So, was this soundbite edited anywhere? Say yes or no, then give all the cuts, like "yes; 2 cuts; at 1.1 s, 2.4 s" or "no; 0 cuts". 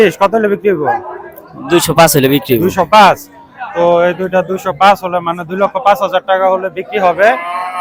no; 0 cuts